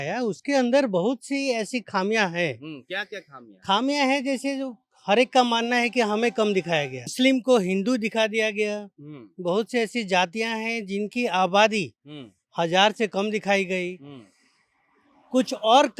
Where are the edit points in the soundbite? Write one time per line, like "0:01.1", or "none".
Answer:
0:07.1

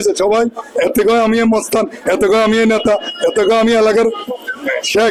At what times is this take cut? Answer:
none

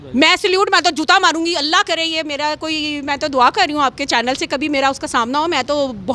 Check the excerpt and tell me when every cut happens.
none

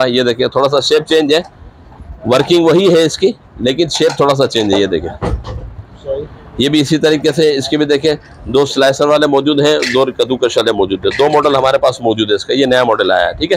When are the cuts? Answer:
none

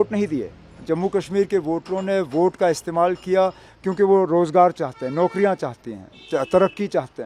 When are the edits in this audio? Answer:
none

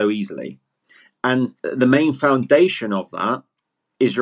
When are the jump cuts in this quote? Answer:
0:01.6

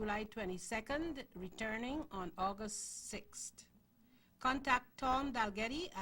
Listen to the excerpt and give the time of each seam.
0:04.5

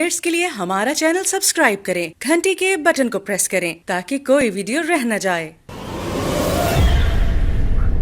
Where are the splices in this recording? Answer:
none

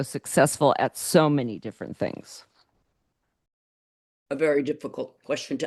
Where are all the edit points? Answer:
none

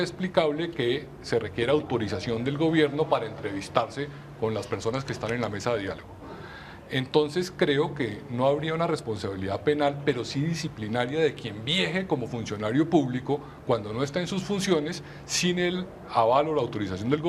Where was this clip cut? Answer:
0:01.0

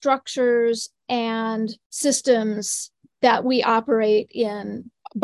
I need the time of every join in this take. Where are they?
0:01.8

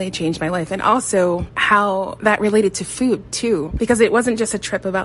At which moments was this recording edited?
0:03.7

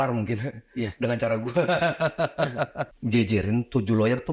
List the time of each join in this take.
0:02.8

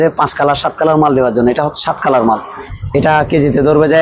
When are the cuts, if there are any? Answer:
0:02.6

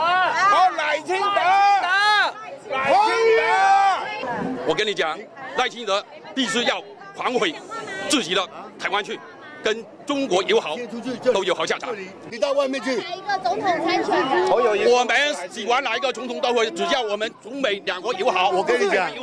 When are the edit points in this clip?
0:04.2
0:12.2

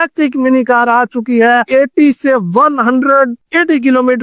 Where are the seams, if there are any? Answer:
0:01.7

